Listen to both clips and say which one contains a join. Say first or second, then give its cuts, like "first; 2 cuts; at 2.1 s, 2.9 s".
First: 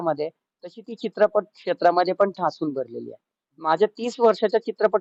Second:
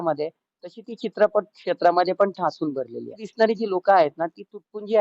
second; 1 cut; at 3.2 s